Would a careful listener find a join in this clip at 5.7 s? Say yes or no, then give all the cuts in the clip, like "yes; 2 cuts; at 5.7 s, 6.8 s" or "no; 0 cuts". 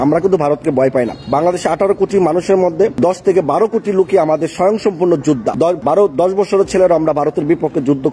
yes; 3 cuts; at 1.2 s, 2.9 s, 5.7 s